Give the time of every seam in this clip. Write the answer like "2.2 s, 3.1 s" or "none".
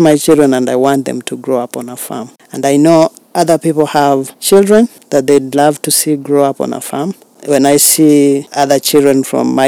2.4 s, 4.3 s, 5.0 s, 7.3 s, 8.5 s